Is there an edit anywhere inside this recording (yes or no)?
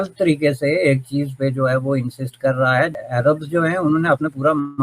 yes